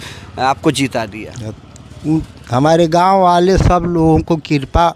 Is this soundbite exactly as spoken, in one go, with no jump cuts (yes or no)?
yes